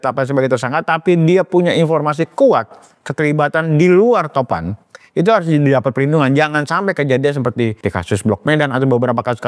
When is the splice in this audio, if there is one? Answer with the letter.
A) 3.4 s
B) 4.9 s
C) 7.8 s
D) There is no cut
C